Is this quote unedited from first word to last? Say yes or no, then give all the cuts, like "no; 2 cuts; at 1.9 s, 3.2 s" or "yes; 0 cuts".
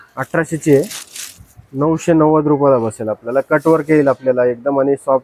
yes; 0 cuts